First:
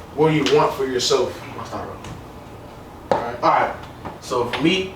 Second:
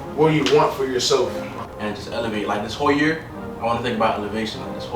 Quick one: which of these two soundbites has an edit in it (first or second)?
second